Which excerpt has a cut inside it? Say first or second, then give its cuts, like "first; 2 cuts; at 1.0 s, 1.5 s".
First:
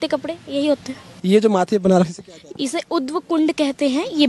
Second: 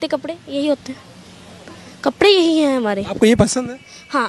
first; 1 cut; at 1.1 s